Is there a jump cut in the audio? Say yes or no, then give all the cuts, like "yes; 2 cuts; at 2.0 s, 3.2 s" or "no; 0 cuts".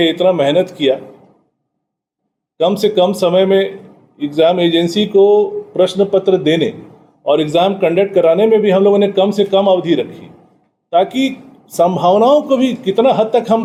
no; 0 cuts